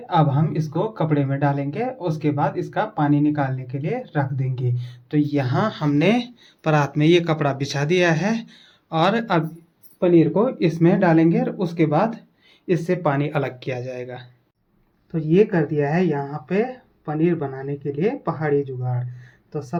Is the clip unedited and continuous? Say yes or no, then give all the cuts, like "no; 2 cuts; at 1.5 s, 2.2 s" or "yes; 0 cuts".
yes; 0 cuts